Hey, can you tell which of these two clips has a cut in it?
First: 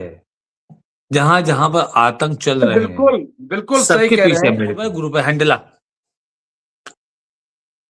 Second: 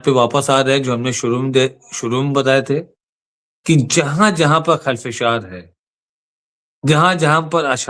first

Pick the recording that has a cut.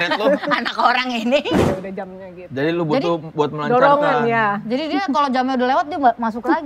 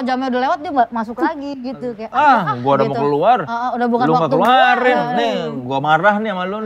first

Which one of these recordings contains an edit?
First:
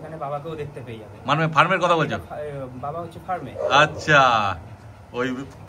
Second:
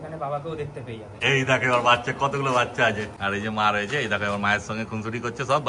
second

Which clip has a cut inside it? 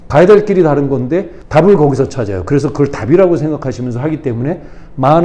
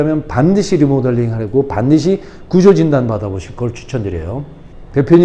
first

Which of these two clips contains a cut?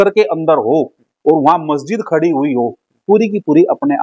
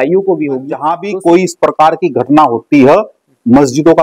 second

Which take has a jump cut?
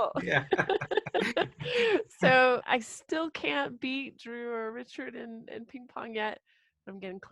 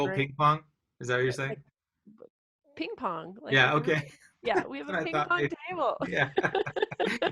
first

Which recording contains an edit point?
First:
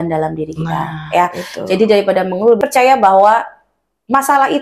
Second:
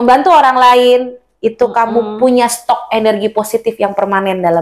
first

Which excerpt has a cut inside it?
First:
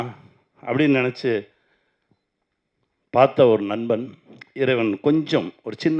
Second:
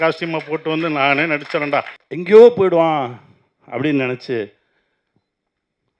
second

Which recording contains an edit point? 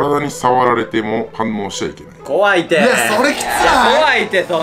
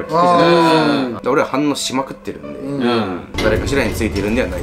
second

